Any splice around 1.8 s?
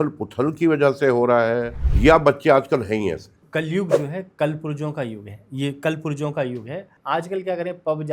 yes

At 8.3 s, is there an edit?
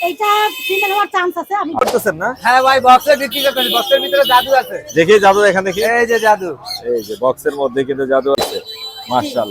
yes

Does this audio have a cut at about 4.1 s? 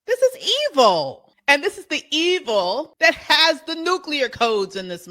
no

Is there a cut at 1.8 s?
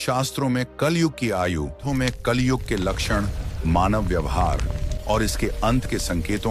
yes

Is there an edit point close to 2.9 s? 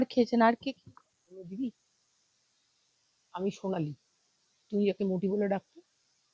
no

